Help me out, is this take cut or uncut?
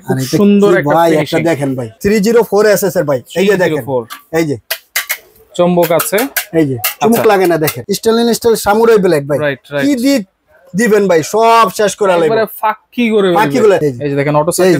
cut